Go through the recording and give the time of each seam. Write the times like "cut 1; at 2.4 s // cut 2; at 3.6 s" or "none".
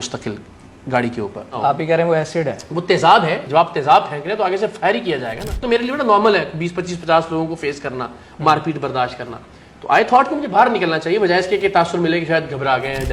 cut 1; at 1.5 s // cut 2; at 3.4 s // cut 3; at 5.5 s